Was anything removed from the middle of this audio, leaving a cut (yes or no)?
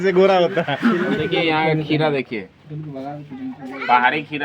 yes